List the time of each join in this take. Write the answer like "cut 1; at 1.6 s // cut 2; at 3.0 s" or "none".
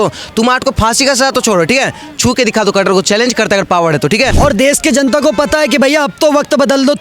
cut 1; at 4.3 s